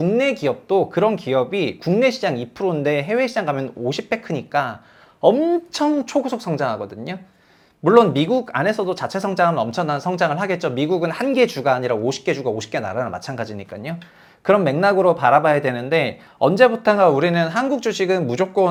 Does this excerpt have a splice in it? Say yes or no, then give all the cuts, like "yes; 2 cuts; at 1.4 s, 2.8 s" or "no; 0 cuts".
no; 0 cuts